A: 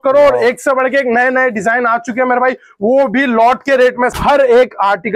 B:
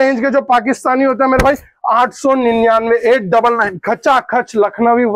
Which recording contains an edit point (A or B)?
A